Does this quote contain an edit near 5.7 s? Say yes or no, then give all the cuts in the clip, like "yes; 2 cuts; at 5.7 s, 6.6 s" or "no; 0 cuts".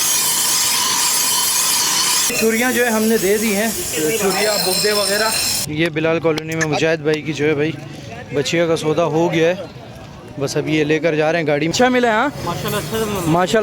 yes; 2 cuts; at 5.7 s, 11.7 s